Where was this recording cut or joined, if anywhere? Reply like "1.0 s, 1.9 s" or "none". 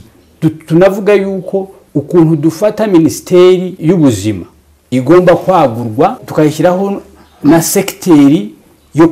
3.7 s, 6.2 s